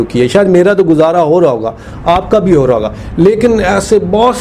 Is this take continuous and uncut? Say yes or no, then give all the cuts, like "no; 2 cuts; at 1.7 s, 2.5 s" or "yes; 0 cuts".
yes; 0 cuts